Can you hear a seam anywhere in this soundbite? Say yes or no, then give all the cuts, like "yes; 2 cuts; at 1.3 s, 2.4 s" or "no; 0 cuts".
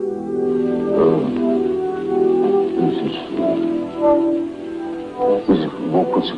no; 0 cuts